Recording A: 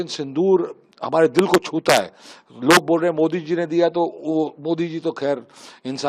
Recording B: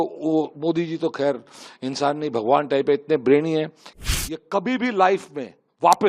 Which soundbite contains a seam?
B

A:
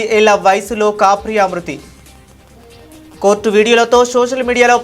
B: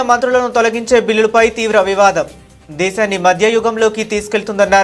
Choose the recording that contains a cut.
A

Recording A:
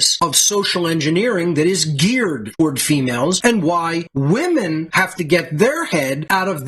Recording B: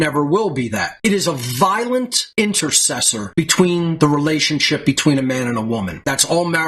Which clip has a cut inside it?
B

